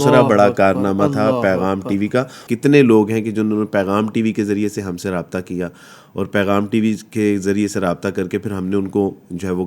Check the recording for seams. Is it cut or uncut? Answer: uncut